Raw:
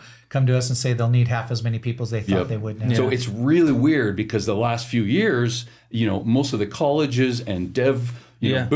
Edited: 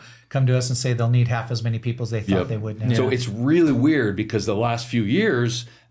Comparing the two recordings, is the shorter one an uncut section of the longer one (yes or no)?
yes